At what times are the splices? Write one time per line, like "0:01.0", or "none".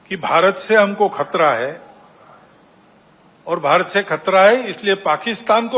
none